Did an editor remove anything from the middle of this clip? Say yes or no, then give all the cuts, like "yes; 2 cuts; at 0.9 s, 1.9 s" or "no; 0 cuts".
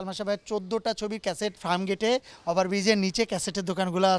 yes; 1 cut; at 1.6 s